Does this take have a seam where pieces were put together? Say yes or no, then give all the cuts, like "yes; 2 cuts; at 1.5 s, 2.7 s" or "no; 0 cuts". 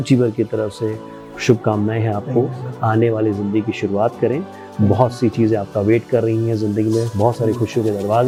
no; 0 cuts